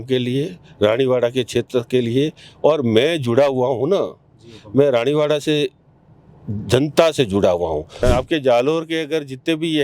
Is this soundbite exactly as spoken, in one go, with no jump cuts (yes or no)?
no